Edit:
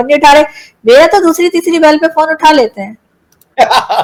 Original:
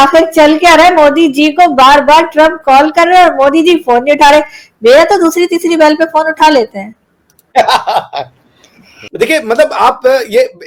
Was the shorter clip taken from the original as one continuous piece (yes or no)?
yes